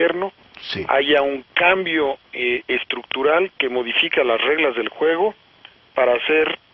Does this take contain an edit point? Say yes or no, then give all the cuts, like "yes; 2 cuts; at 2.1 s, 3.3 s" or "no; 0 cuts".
no; 0 cuts